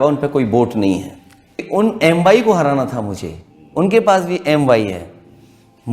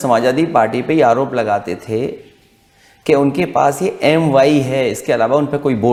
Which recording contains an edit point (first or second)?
first